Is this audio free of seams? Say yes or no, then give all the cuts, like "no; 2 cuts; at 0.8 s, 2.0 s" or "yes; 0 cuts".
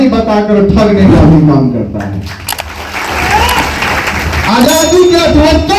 yes; 0 cuts